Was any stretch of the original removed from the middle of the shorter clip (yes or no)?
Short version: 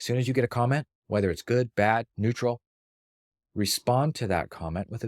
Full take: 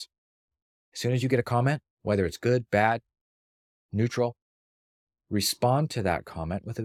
yes